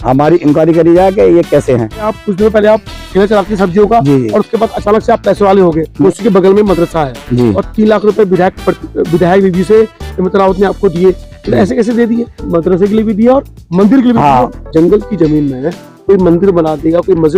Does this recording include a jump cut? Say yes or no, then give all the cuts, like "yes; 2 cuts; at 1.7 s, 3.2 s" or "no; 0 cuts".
yes; 4 cuts; at 2.2 s, 5.9 s, 12.4 s, 14.6 s